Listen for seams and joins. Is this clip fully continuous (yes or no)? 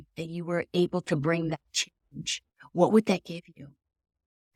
yes